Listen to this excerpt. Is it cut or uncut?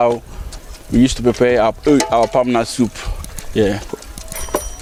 uncut